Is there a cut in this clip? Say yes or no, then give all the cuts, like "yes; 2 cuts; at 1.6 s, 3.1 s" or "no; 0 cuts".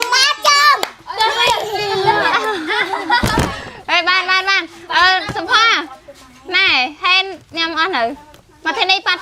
no; 0 cuts